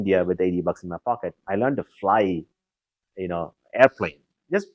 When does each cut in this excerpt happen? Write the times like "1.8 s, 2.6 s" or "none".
none